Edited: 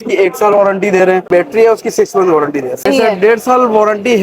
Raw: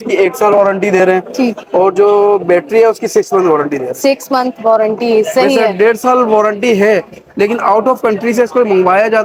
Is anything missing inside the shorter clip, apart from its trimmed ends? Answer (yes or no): yes